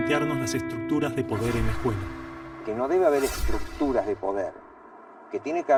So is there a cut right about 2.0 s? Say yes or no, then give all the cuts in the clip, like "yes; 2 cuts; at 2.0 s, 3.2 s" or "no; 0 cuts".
no; 0 cuts